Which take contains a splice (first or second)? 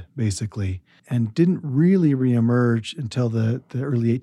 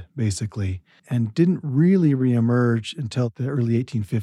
second